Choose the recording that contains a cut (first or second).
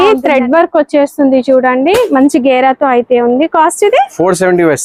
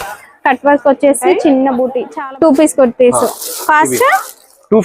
second